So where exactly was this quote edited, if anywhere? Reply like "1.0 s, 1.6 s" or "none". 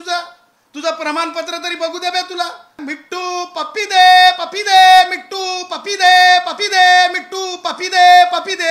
2.8 s